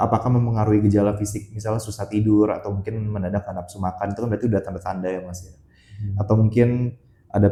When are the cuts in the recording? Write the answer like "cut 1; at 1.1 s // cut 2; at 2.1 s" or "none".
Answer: none